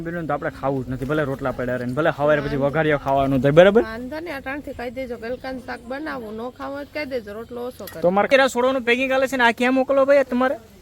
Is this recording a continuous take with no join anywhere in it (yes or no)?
no